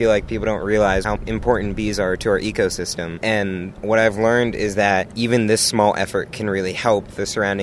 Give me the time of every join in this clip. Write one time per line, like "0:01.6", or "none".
0:01.1
0:03.0